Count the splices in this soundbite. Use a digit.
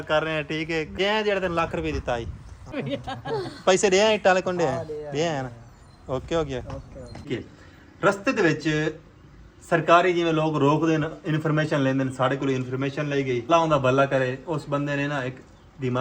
5